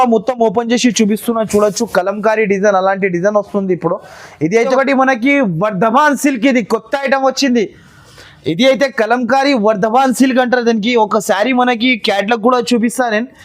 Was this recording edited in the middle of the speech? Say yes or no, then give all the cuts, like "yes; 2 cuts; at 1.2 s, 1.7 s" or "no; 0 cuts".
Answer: yes; 1 cut; at 4.6 s